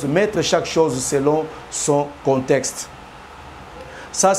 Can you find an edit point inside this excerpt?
no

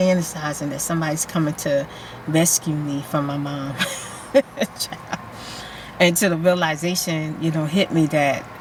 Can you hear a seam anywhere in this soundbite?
no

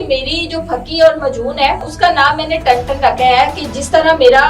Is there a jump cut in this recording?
yes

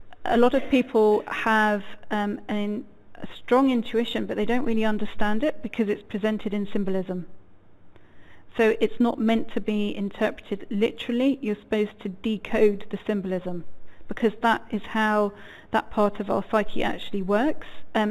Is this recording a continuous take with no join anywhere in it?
no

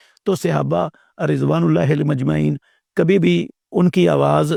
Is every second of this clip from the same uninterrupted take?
yes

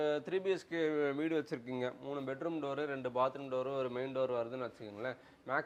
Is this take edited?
no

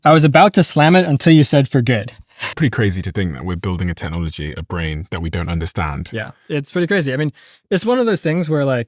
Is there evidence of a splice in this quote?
yes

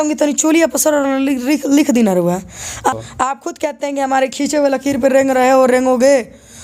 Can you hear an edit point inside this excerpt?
yes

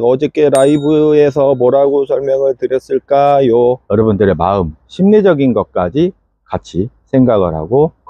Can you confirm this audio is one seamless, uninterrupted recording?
no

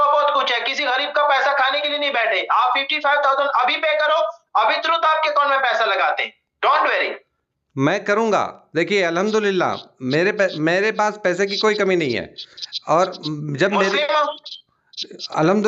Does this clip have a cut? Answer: no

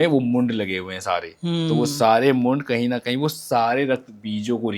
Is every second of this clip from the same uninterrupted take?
yes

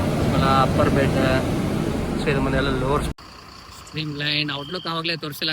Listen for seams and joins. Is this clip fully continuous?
no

